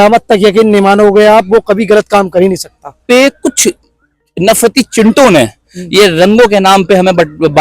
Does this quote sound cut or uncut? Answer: cut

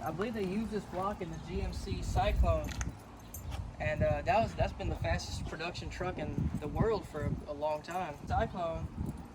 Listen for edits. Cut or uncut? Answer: cut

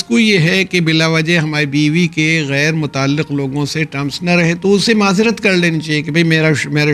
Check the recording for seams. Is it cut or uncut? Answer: uncut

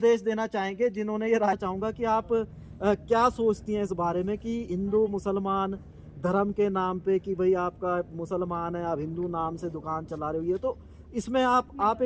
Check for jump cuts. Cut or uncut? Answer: cut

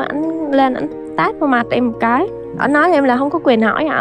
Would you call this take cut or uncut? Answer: uncut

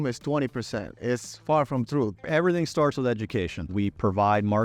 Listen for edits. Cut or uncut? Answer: cut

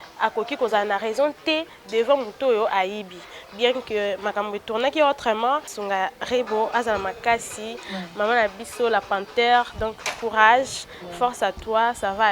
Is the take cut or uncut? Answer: cut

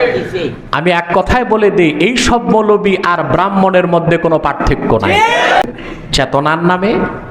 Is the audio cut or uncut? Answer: cut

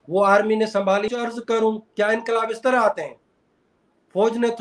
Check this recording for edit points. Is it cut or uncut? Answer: cut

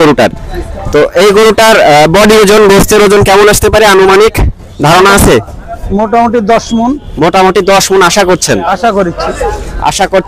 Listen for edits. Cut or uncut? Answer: uncut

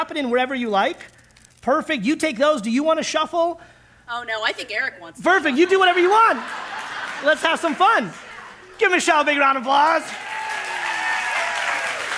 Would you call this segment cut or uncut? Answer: uncut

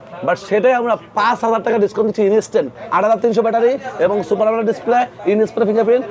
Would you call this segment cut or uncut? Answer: cut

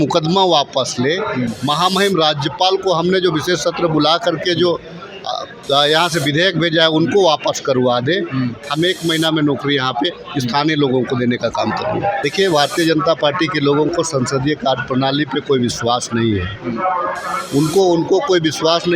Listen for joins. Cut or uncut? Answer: cut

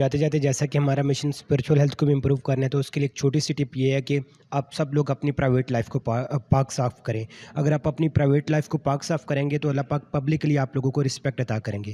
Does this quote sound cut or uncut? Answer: uncut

